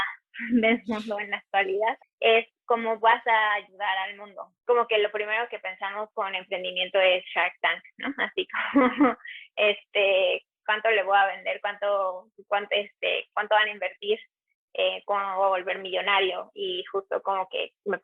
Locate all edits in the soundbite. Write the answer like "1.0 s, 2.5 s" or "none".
2.1 s, 4.5 s